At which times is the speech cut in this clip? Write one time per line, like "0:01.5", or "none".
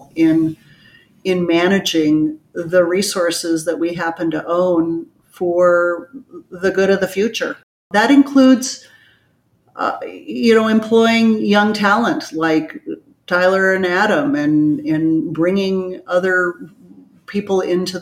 0:07.8

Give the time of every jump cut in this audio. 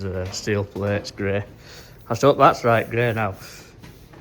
none

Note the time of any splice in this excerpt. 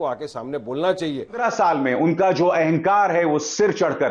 0:01.4

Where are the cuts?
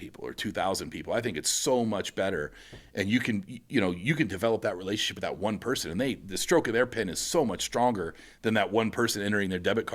none

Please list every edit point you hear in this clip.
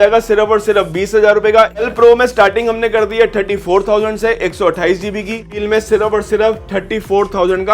0:01.8
0:05.5

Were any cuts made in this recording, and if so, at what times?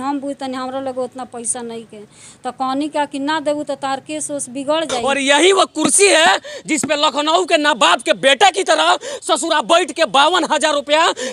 0:05.0

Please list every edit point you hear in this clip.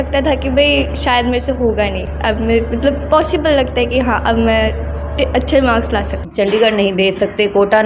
0:02.1
0:06.2

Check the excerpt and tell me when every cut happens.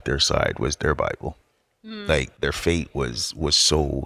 0:02.3

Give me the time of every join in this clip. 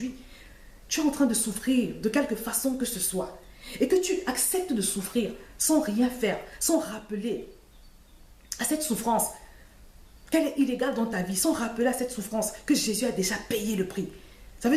none

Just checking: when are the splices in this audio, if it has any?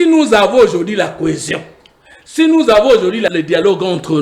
0:03.3

